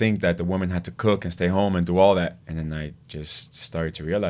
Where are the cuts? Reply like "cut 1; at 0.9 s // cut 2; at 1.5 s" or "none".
cut 1; at 2.4 s